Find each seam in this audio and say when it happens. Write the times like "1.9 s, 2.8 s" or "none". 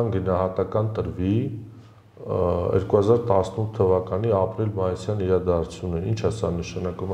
none

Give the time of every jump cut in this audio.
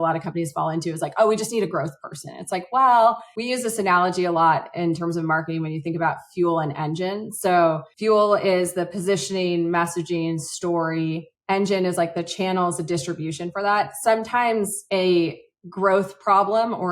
3.3 s, 7.9 s

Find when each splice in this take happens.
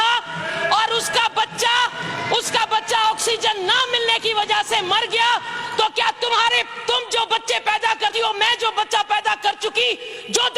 none

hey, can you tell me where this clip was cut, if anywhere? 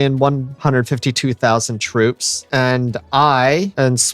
none

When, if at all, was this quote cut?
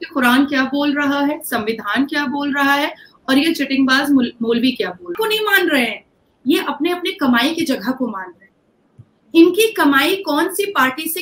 5.1 s

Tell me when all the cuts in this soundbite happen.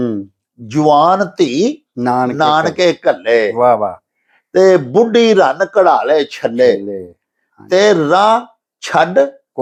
none

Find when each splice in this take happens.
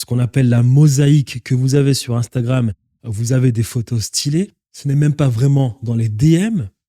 4.7 s

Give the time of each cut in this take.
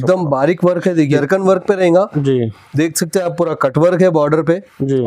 1.1 s

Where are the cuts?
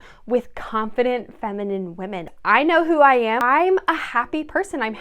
2.3 s, 3.4 s

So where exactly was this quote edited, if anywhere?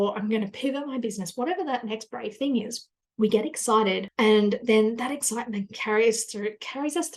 none

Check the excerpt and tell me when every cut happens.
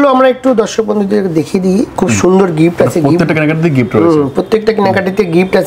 none

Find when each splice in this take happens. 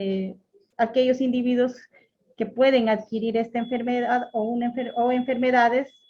none

